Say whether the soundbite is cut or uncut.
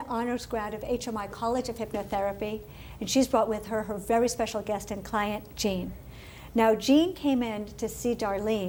uncut